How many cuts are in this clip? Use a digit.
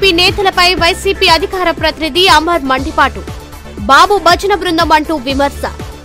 0